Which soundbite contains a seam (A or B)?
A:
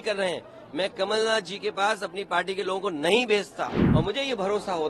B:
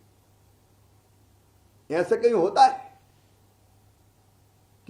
A